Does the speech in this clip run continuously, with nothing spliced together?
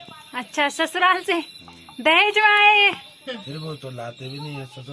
yes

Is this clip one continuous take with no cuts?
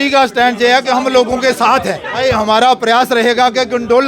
no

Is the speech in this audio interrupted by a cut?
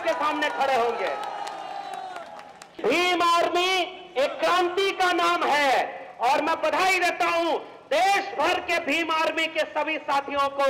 no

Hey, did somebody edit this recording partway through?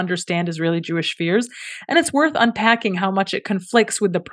no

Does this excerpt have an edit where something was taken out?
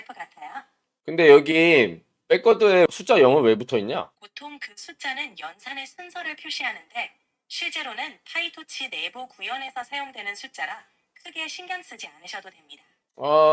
yes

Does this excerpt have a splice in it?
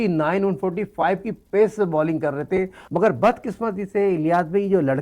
yes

